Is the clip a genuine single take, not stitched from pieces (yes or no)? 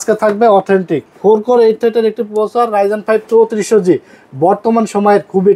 no